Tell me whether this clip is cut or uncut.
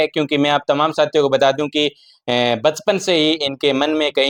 uncut